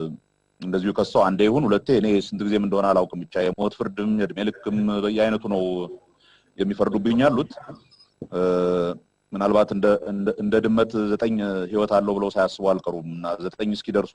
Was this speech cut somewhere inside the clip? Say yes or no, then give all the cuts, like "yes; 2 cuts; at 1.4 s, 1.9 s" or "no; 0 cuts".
no; 0 cuts